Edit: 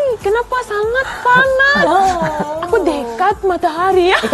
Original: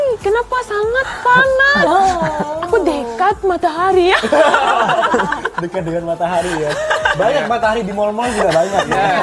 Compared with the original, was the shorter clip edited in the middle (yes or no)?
no